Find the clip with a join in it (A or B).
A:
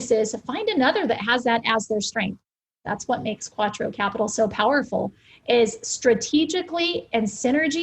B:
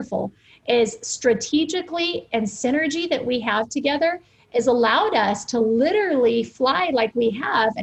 A